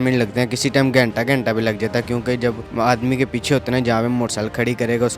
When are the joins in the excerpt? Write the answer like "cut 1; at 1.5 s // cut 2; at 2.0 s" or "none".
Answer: cut 1; at 2.6 s